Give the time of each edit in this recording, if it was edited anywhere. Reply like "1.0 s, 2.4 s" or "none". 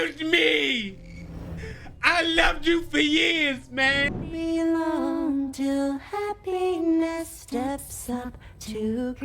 4.3 s